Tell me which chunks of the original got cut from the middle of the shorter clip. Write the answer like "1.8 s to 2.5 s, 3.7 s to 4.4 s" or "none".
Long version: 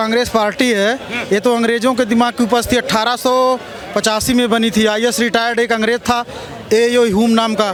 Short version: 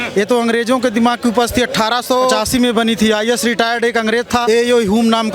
3.5 s to 4.1 s, 6.2 s to 6.7 s